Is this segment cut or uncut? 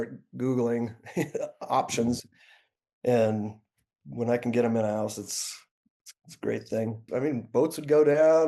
cut